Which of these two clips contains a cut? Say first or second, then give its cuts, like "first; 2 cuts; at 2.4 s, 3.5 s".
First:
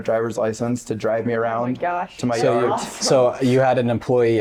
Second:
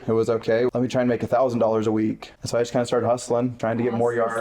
second; 3 cuts; at 0.7 s, 2.3 s, 3.6 s